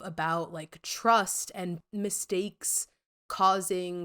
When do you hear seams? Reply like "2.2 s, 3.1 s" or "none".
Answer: 1.8 s